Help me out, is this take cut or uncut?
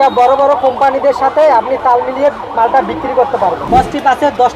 cut